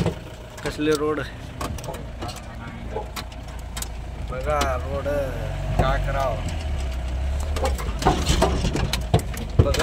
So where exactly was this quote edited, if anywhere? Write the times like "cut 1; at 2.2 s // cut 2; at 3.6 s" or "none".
none